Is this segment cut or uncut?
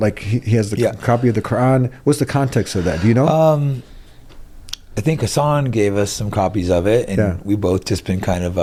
uncut